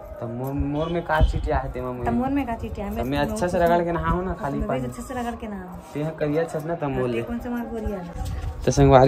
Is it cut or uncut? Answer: uncut